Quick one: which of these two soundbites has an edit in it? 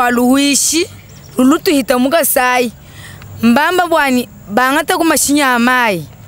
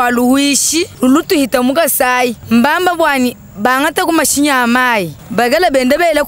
second; 3 cuts; at 0.9 s, 2.4 s, 5.2 s

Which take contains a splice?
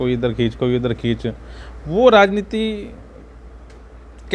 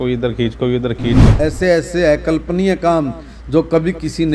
second; 1 cut; at 1.3 s

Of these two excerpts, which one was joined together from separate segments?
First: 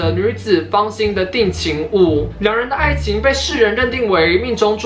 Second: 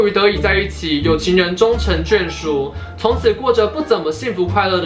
first; 1 cut; at 2.3 s

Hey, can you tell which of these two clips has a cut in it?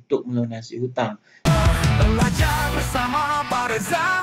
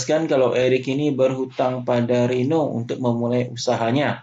first; 1 cut; at 1.3 s

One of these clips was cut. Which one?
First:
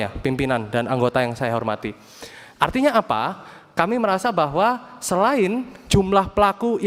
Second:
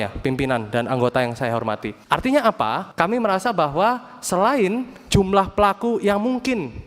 second; 2 cuts; at 1.9 s, 2.8 s

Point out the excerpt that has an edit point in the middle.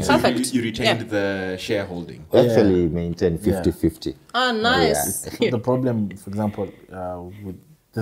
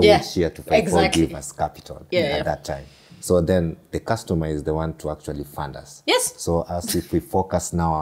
first; 1 cut; at 5.3 s

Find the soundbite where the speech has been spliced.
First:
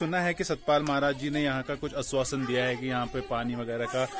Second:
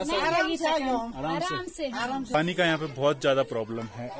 second; 1 cut; at 2.3 s

